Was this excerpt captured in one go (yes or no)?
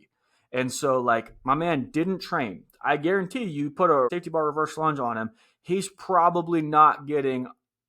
no